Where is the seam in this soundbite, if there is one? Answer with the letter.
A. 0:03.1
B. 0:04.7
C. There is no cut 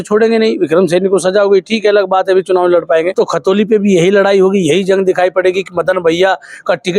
A